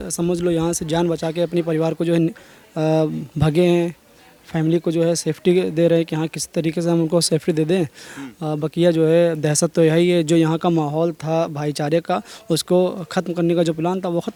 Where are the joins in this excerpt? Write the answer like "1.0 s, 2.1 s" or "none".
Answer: none

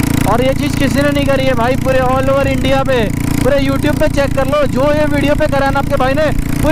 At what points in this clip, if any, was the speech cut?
none

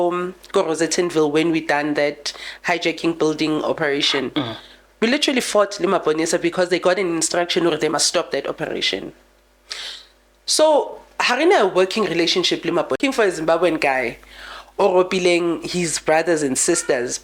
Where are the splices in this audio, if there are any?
13.0 s

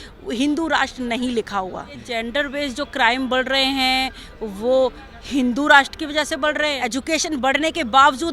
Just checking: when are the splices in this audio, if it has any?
2.0 s, 6.8 s

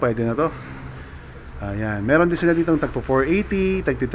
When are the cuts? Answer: none

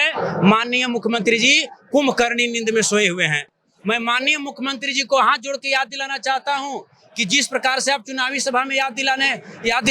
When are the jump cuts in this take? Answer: none

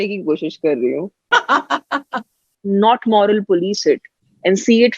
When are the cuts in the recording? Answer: 1.2 s, 2.5 s

